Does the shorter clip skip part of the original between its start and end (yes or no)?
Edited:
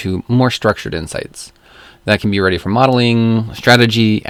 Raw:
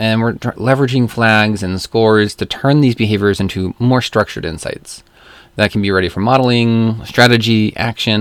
no